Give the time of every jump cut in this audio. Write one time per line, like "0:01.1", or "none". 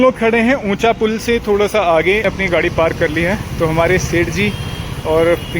0:02.2